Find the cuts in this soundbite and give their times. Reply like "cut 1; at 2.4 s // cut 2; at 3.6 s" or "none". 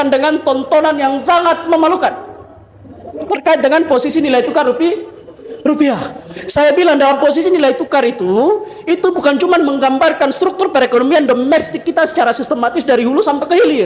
none